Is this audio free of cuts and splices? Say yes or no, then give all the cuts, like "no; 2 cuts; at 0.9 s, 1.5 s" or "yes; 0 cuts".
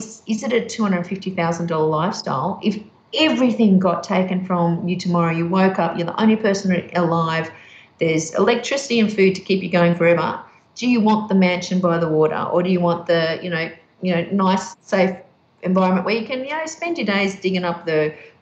yes; 0 cuts